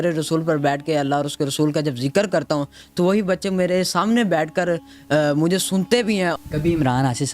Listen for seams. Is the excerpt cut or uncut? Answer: cut